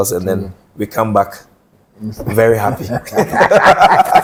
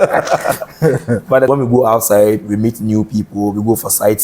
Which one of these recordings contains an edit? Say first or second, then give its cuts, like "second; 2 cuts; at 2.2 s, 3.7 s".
second; 1 cut; at 1.5 s